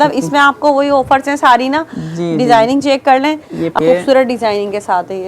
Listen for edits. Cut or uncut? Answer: cut